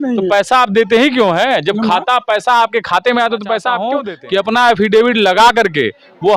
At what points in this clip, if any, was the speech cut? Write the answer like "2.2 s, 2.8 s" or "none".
3.9 s

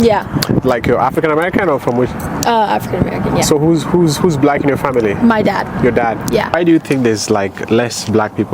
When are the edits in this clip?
6.6 s

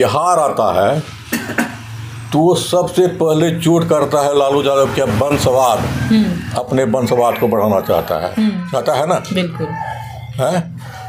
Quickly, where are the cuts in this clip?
none

